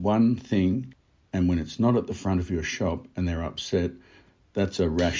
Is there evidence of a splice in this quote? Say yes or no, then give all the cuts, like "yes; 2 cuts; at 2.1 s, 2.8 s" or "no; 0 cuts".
yes; 1 cut; at 0.9 s